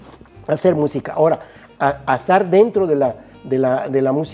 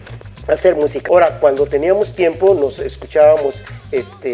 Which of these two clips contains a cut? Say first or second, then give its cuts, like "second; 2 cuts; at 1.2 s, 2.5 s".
second; 1 cut; at 1.0 s